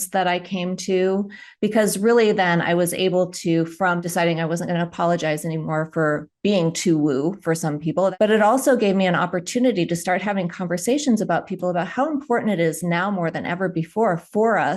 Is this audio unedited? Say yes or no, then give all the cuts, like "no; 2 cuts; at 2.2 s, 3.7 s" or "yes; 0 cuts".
no; 2 cuts; at 4.0 s, 8.1 s